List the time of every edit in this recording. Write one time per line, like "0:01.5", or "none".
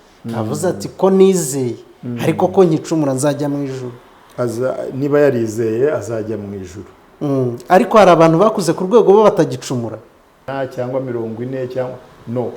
0:10.5